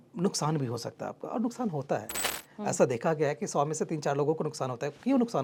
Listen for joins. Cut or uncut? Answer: uncut